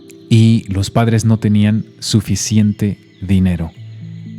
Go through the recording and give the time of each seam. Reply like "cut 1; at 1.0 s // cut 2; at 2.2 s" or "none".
none